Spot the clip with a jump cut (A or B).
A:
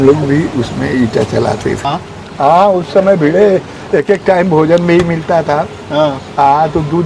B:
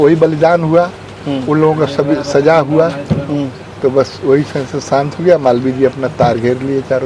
A